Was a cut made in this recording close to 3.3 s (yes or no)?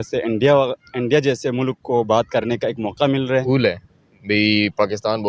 yes